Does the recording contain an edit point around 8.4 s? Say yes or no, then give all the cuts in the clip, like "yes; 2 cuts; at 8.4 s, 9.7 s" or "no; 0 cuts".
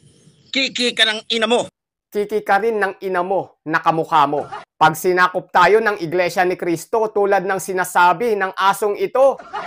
no; 1 cut; at 4.6 s